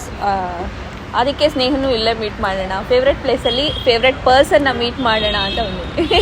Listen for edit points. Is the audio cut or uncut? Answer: uncut